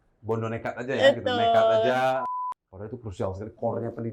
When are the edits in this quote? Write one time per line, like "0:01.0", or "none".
0:02.4